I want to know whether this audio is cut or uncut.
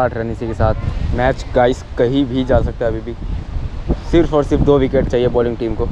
cut